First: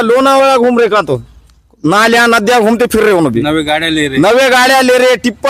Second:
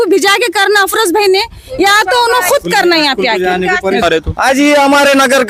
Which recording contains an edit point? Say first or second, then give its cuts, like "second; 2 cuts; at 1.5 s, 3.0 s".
second; 1 cut; at 4.0 s